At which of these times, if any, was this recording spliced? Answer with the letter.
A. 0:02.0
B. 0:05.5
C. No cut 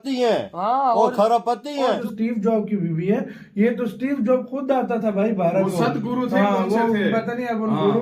A